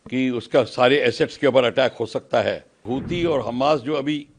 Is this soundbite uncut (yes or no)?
no